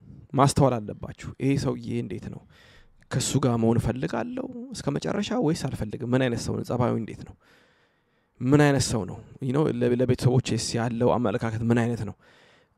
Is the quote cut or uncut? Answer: uncut